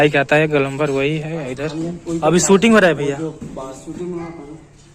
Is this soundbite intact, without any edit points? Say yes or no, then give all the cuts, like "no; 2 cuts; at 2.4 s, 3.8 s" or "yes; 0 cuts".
no; 1 cut; at 1.7 s